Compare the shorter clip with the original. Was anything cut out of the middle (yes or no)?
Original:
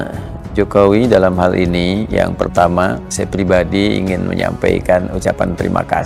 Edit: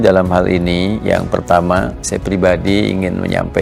no